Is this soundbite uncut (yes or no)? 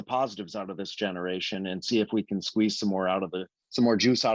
yes